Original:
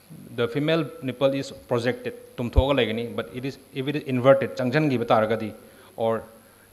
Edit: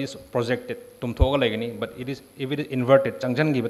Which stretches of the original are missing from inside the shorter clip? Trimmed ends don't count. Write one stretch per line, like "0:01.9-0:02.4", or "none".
none